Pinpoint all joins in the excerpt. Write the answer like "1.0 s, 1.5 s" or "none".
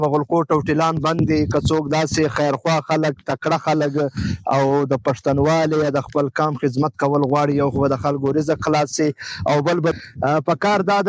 9.9 s